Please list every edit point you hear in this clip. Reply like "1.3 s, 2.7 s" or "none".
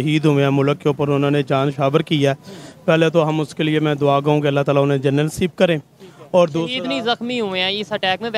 none